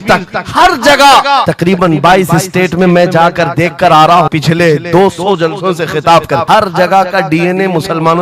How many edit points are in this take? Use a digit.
3